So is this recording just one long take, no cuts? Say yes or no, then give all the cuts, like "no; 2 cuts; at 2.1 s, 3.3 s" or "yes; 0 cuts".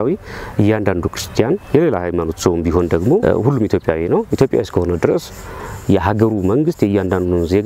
yes; 0 cuts